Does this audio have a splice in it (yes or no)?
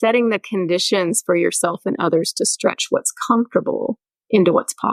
no